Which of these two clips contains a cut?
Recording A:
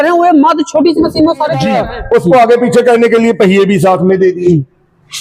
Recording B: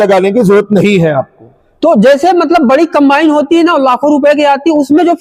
A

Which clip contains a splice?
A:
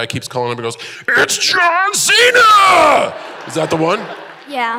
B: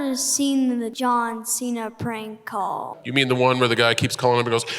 B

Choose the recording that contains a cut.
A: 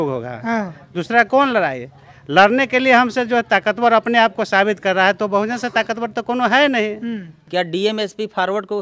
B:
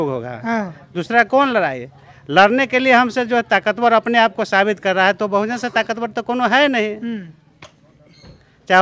A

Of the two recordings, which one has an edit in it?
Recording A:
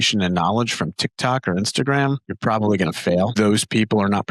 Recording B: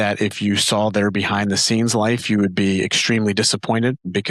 A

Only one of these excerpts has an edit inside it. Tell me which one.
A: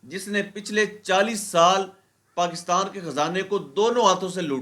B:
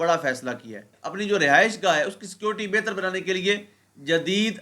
B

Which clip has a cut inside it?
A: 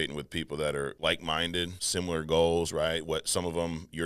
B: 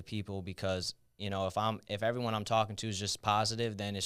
A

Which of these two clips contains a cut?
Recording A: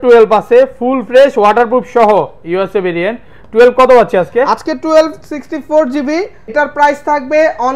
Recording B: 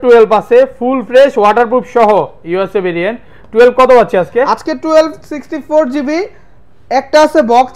A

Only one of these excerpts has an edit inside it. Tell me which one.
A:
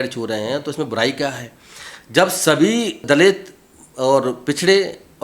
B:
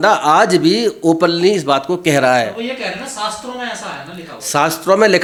A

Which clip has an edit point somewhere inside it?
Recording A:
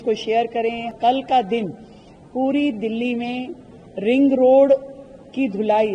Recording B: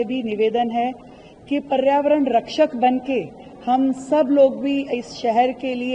A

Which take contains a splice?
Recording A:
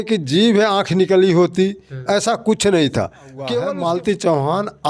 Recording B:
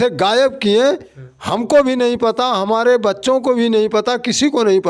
A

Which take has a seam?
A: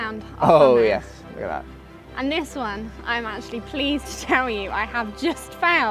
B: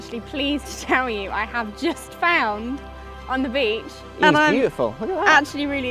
B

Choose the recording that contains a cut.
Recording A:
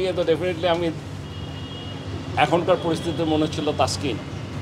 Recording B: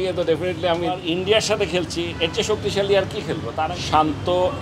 B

